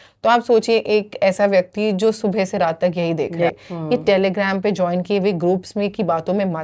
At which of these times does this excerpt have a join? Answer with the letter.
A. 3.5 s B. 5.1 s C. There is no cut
A